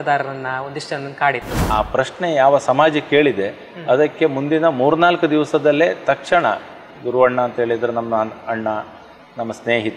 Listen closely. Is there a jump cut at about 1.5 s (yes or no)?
yes